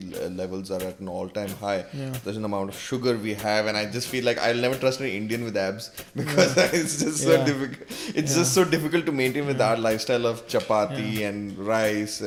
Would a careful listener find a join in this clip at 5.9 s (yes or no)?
no